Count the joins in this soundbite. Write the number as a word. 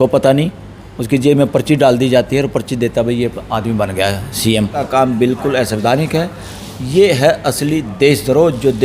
one